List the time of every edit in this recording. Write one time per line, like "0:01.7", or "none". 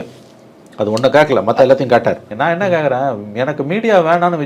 0:02.2